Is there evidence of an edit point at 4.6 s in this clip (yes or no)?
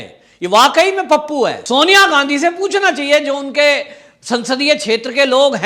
no